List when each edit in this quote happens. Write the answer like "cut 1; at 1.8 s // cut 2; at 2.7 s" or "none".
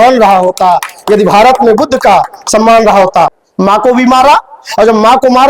cut 1; at 3.4 s